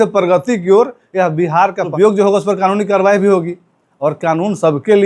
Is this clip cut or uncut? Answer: cut